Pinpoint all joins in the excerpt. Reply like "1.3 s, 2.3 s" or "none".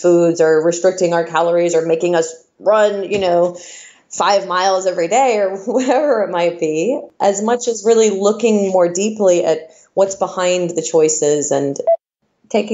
7.1 s, 11.9 s

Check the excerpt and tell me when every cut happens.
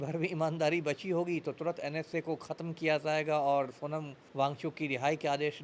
4.2 s

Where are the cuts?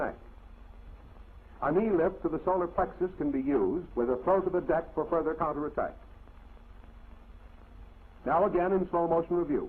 3.7 s

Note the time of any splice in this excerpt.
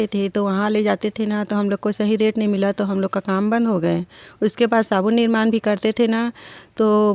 none

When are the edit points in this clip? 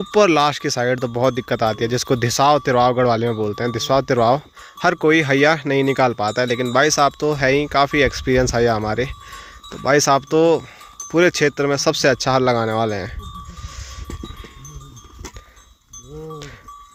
none

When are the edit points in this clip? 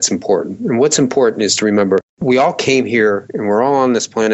none

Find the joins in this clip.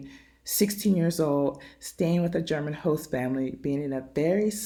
none

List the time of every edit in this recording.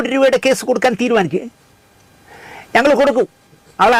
none

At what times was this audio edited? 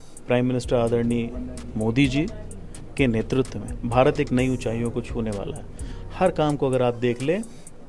5.9 s

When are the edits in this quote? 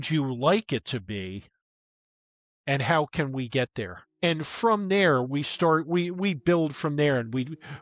4.0 s

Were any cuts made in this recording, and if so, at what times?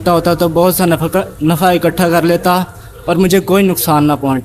none

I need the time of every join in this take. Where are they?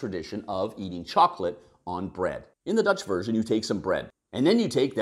2.5 s, 4.1 s

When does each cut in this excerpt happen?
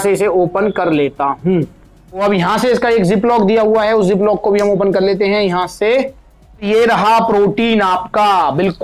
2.2 s, 6.7 s

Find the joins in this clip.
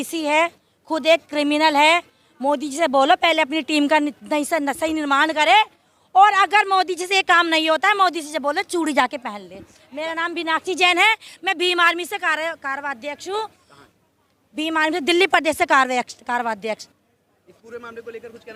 none

